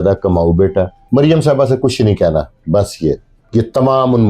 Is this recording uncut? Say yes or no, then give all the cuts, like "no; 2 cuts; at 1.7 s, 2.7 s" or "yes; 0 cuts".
no; 2 cuts; at 1.0 s, 3.3 s